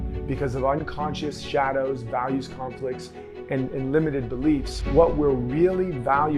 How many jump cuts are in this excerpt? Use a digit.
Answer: 1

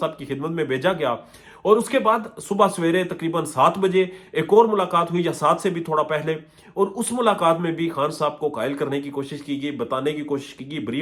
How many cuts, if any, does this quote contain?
0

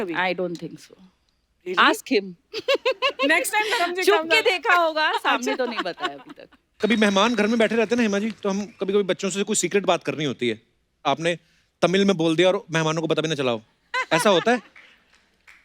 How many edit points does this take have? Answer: 1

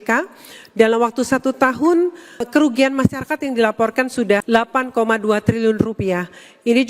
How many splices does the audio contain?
2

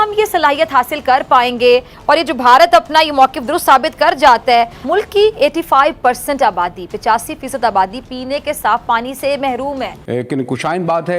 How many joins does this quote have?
2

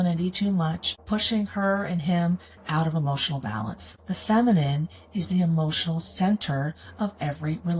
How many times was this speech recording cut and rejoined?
2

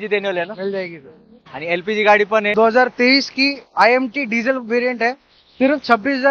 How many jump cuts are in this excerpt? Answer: 1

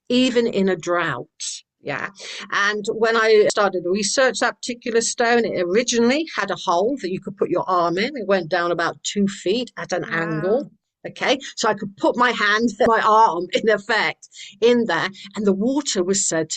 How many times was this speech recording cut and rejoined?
2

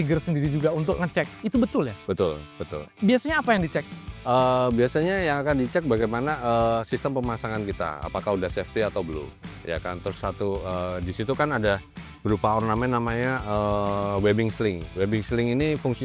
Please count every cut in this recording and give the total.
1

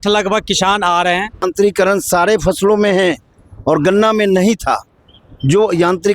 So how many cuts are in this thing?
1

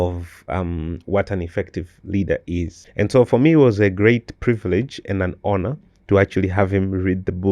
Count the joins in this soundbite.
1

